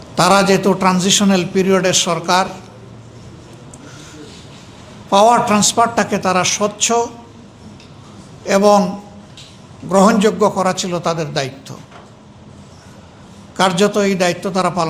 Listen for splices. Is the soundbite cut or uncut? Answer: uncut